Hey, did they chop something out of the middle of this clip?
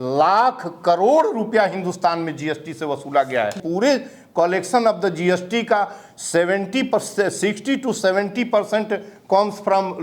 yes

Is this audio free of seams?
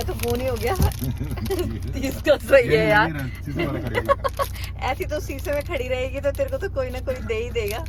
yes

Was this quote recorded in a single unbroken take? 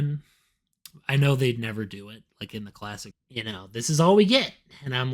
no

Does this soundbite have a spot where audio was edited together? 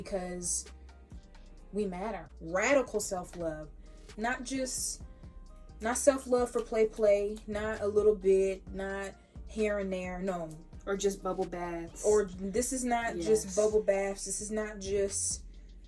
yes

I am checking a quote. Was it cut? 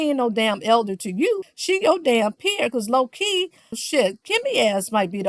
yes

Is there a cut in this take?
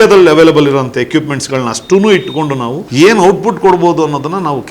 yes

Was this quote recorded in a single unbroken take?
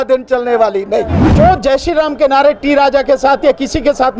no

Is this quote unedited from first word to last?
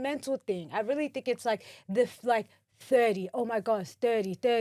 yes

